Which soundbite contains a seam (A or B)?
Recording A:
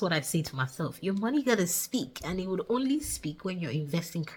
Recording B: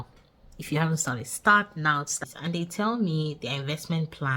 B